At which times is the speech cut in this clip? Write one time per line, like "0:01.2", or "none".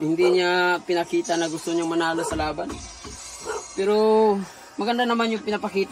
0:02.8